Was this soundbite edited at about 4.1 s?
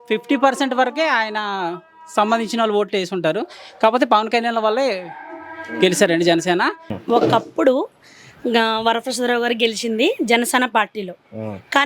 no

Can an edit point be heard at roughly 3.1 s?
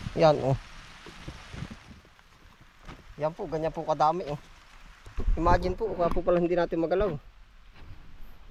no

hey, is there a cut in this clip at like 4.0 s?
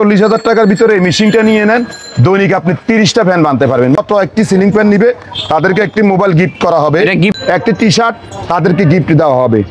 yes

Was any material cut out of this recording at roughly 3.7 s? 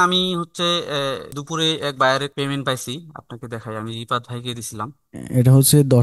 no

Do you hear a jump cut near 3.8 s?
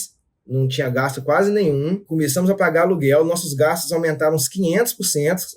no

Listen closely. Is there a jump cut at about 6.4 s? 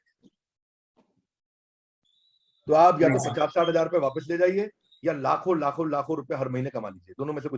no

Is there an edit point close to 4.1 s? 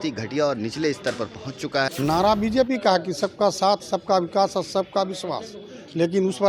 no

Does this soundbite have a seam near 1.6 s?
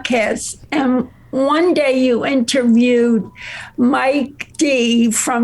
no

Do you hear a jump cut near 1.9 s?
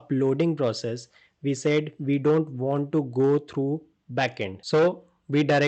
no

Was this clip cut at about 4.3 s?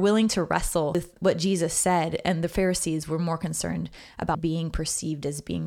yes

